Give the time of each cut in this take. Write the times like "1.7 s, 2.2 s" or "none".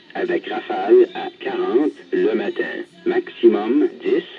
1.1 s, 2.0 s